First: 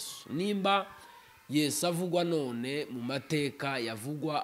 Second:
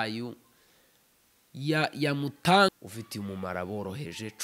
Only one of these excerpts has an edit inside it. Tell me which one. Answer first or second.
second